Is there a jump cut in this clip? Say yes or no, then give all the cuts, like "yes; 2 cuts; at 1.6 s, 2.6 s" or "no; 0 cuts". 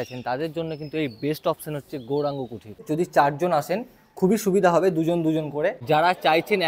yes; 2 cuts; at 2.8 s, 5.8 s